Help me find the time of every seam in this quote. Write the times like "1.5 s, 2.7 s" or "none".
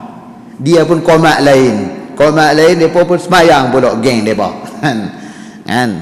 none